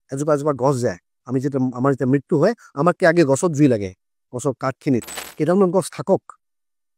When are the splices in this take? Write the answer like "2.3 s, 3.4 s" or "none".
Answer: 5.2 s

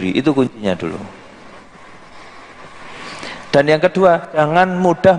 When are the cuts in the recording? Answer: none

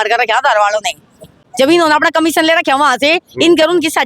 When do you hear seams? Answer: 1.4 s

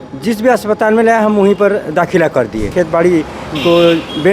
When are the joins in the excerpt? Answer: 2.7 s

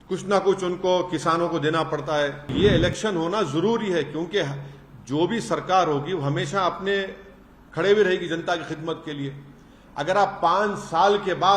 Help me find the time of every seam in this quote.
2.5 s

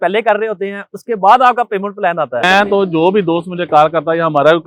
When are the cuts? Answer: 2.4 s

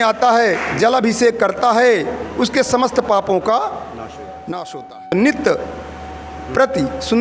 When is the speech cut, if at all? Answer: 5.1 s

